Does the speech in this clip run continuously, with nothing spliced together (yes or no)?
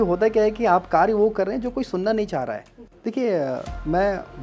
no